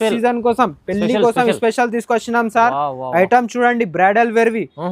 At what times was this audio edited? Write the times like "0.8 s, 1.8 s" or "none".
none